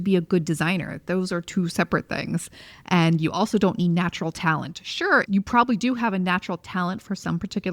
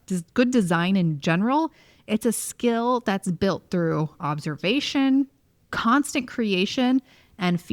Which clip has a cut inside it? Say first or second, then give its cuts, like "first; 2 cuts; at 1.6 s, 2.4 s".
first; 1 cut; at 5.2 s